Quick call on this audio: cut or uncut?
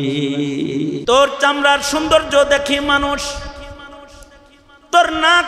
cut